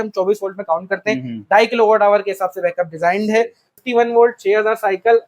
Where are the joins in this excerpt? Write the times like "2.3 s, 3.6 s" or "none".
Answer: 3.7 s